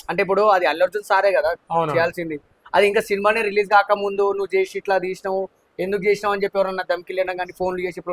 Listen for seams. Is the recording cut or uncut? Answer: uncut